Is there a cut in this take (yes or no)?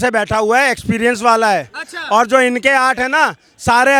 no